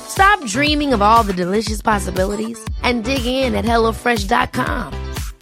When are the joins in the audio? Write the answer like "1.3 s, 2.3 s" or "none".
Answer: none